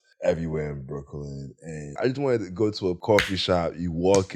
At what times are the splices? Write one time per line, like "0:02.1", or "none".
0:01.9
0:03.0